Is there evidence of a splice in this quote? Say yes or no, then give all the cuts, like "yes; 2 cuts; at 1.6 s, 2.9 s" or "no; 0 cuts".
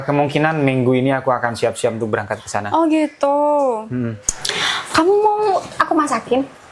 no; 0 cuts